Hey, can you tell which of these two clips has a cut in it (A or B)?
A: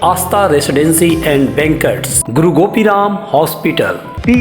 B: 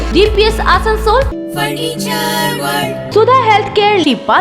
B